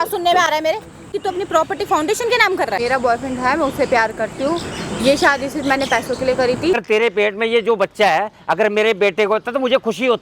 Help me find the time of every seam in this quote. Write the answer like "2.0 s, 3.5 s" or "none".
1.1 s, 2.8 s, 6.8 s